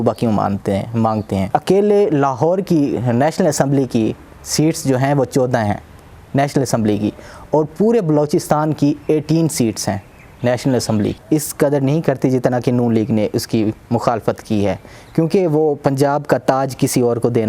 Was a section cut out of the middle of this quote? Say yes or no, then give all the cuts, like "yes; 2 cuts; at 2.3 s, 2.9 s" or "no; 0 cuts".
yes; 2 cuts; at 1.5 s, 11.1 s